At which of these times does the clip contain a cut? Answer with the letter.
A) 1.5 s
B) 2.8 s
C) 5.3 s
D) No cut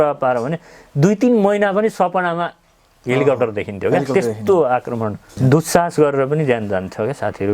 C